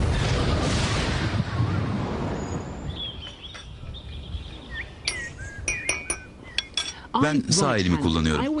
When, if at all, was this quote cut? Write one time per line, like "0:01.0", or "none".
0:02.0